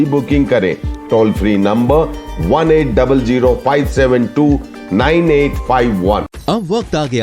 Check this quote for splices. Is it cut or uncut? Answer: uncut